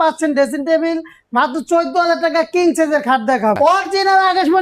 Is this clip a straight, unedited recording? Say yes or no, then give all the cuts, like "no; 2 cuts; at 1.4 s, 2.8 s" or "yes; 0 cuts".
no; 1 cut; at 3.6 s